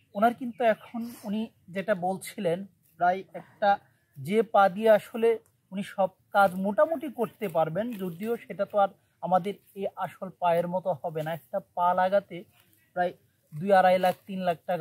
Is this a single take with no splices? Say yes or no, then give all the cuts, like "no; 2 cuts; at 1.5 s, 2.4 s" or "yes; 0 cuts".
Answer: yes; 0 cuts